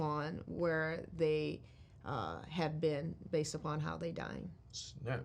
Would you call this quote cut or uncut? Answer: uncut